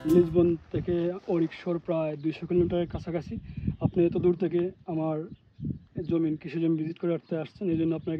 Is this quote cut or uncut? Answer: uncut